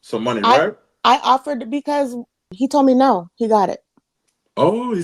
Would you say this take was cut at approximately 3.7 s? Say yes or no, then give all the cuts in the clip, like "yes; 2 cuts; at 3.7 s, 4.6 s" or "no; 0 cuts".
no; 1 cut; at 2.4 s